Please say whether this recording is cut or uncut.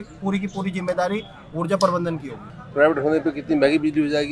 cut